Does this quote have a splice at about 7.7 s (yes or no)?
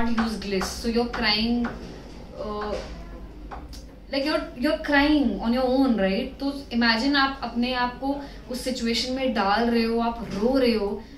no